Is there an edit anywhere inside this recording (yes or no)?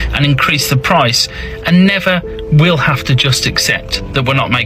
no